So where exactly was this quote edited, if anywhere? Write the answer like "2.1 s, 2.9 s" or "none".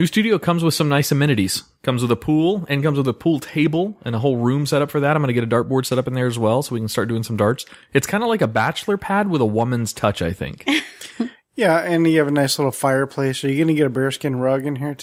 none